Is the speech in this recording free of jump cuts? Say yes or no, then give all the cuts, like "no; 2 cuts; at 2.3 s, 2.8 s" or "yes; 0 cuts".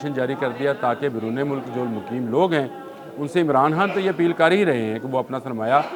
yes; 0 cuts